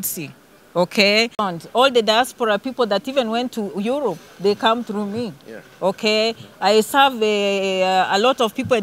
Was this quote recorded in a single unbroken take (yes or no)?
no